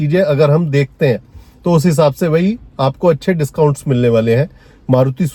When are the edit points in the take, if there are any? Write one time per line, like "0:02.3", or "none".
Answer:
none

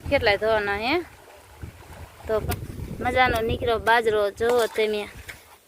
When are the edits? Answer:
0:02.4

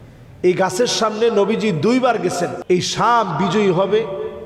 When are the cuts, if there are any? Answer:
0:02.6

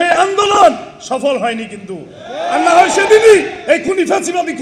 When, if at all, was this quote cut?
none

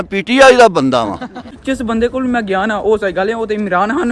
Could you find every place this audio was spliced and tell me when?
0:01.5

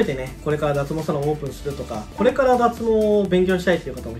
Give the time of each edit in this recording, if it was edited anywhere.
0:02.0

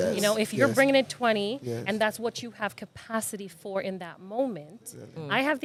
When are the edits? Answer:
none

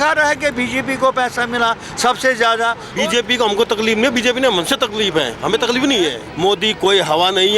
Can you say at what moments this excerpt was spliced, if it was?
0:02.8
0:06.2

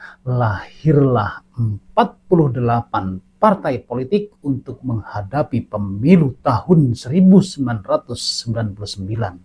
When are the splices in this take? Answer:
none

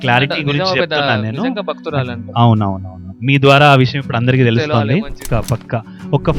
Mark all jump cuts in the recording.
0:05.2

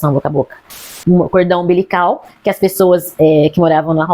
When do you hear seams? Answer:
0:00.9

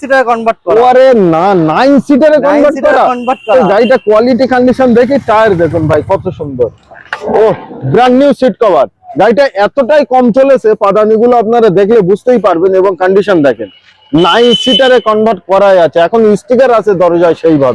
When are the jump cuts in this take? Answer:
none

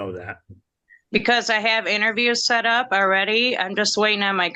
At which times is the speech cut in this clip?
none

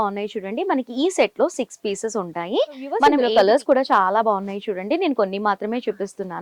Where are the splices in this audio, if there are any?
0:02.8

